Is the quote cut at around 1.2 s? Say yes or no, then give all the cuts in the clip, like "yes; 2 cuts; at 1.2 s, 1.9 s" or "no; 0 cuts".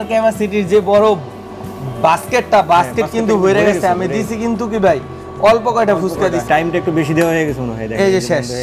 no; 0 cuts